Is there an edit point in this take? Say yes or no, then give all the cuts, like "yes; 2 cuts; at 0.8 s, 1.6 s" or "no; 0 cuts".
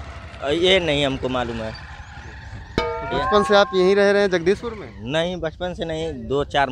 no; 0 cuts